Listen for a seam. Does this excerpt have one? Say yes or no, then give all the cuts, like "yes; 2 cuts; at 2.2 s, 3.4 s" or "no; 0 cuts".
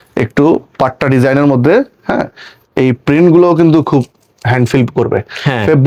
no; 0 cuts